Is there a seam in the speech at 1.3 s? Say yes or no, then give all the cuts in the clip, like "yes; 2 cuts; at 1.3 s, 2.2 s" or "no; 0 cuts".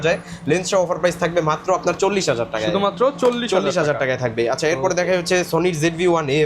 no; 0 cuts